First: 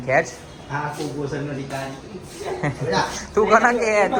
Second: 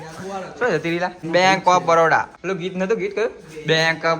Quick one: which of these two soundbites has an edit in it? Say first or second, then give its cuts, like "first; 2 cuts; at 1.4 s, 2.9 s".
second; 2 cuts; at 1.2 s, 2.4 s